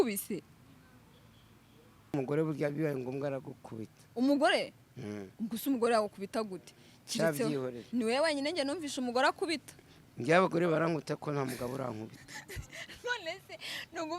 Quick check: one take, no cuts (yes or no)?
no